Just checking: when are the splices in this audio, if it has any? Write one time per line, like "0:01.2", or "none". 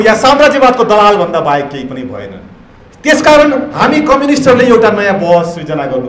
none